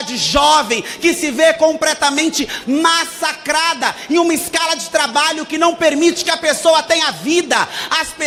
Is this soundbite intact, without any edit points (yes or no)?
yes